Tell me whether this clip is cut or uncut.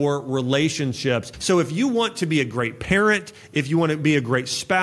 cut